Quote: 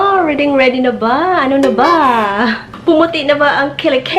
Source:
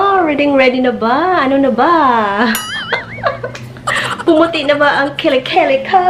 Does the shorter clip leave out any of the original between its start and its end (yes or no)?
yes